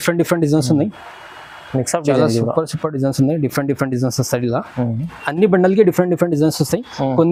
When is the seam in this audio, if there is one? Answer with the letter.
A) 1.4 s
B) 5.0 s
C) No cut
C